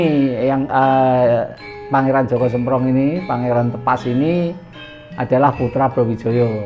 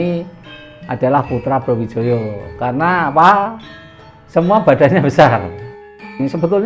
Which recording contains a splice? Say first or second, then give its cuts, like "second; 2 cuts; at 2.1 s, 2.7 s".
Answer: second; 1 cut; at 5.7 s